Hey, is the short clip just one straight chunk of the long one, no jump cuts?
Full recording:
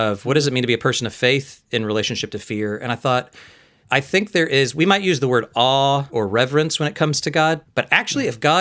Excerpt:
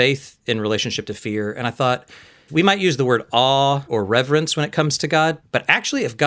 no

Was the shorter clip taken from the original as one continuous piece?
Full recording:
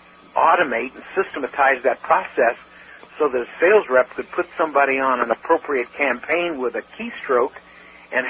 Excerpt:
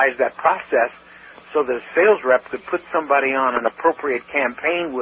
yes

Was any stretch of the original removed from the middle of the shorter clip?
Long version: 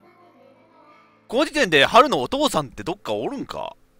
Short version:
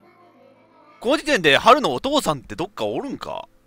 yes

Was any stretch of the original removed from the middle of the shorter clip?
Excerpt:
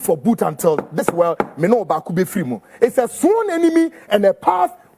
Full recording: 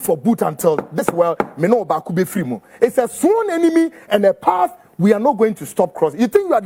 no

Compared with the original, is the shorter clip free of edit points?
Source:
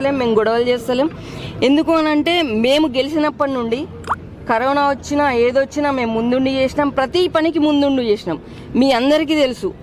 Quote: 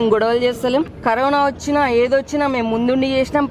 no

